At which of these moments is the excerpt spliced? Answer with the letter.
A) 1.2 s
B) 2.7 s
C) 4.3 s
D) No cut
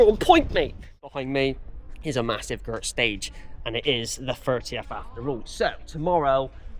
A